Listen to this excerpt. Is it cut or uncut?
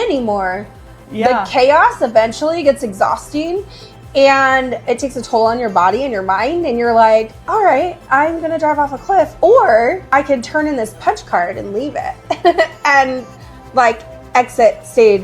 cut